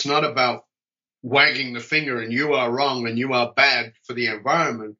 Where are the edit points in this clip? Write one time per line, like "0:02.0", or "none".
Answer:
none